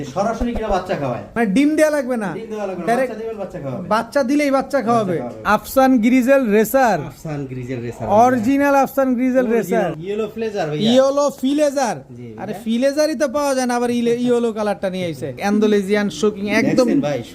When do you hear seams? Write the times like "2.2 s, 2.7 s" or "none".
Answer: 1.3 s, 5.4 s, 10.0 s, 15.4 s